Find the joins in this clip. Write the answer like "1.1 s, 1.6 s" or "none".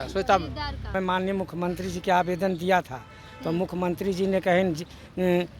0.9 s